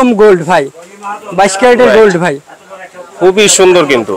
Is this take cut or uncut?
uncut